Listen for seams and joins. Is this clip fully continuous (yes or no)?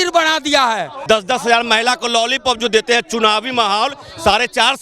no